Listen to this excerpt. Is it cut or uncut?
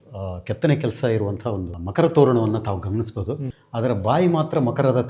cut